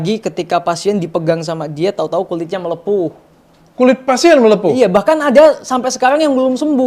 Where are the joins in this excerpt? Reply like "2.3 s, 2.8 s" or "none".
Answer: none